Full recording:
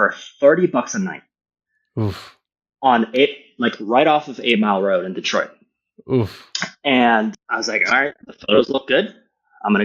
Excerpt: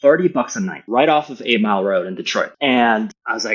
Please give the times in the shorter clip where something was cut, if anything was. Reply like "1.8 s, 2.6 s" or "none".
0.8 s, 2.5 s